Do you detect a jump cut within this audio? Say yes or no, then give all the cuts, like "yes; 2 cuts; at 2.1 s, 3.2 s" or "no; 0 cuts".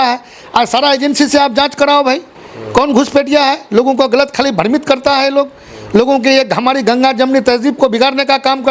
no; 0 cuts